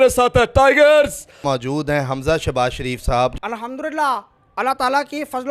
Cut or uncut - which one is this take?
cut